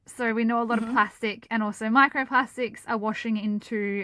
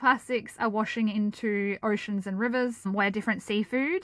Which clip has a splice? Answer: second; 1 cut; at 2.9 s

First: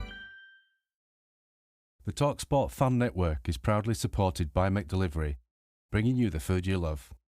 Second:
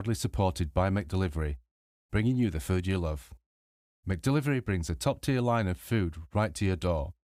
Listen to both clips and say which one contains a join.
first; 1 cut; at 1.2 s

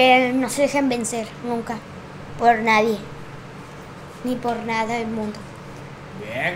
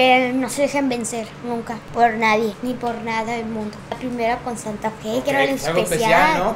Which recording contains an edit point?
second; 3 cuts; at 1.8 s, 2.6 s, 4.0 s

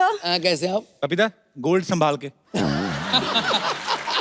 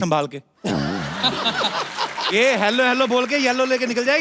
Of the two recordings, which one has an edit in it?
first; 1 cut; at 0.9 s

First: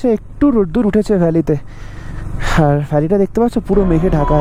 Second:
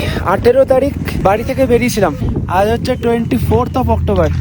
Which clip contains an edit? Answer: second; 2 cuts; at 1.1 s, 2.2 s

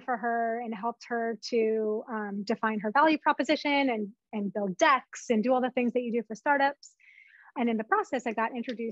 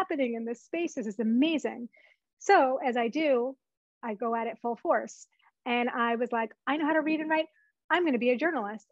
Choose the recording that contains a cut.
first; 1 cut; at 7.5 s

